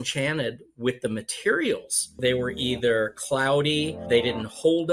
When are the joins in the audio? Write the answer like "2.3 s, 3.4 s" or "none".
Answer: 2.2 s, 4.0 s